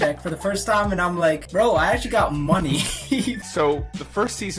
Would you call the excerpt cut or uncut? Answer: cut